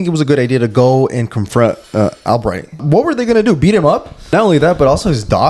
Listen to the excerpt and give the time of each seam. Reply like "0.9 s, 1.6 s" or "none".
2.8 s, 4.1 s